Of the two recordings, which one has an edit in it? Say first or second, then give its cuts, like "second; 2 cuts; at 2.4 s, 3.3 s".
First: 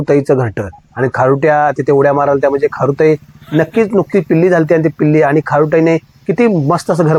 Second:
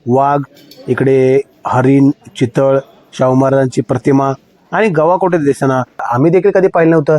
second; 1 cut; at 6.0 s